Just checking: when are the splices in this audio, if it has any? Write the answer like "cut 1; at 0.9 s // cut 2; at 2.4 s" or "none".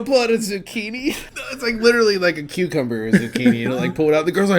cut 1; at 1.3 s